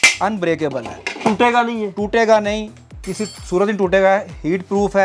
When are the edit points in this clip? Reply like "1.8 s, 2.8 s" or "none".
none